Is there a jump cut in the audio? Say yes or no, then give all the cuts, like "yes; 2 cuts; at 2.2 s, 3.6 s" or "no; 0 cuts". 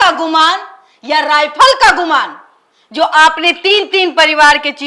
no; 0 cuts